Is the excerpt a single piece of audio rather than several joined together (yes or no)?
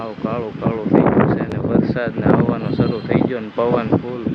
yes